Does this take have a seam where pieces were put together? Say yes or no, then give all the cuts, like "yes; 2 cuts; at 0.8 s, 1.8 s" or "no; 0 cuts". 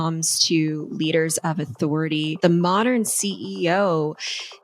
yes; 1 cut; at 2.4 s